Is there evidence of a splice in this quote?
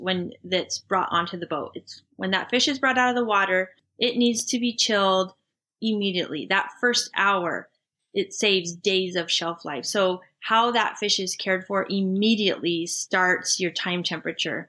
no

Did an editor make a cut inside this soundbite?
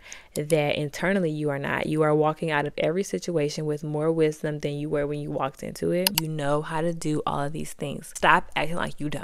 yes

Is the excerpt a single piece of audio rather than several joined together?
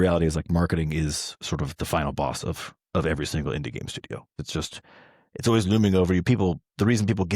no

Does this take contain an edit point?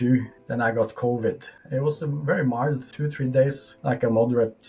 no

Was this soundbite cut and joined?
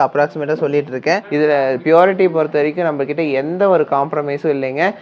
yes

